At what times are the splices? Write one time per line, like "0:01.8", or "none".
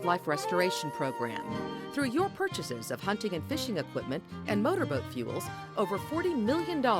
0:01.4